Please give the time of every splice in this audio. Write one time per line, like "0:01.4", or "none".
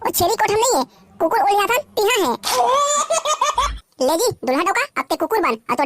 0:03.7

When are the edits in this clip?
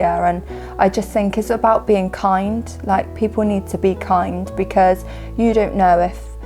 none

